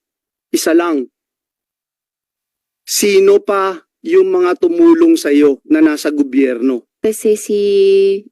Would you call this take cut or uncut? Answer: cut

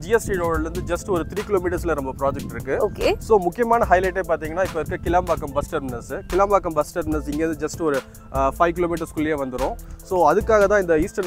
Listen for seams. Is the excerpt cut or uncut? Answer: uncut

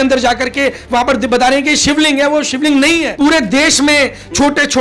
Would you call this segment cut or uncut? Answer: cut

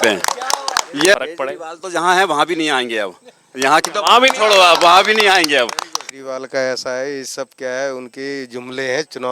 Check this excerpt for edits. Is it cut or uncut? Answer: cut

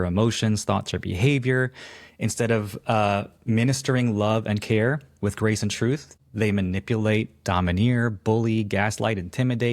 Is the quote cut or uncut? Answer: cut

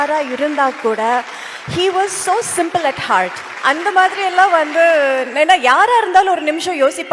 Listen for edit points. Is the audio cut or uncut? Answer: uncut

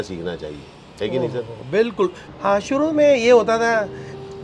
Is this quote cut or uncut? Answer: cut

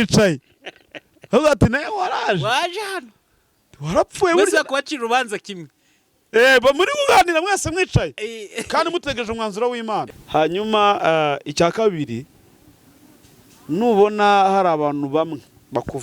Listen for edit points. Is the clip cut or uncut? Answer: cut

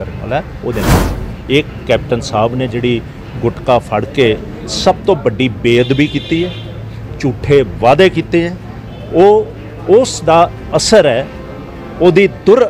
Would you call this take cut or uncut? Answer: uncut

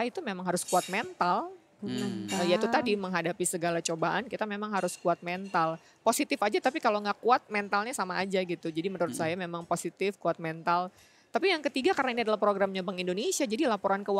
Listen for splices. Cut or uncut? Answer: uncut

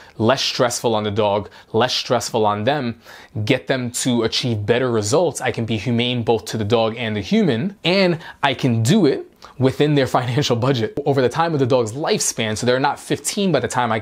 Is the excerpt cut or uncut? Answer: uncut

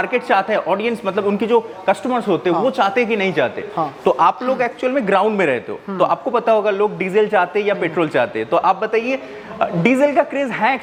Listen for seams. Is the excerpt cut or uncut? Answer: uncut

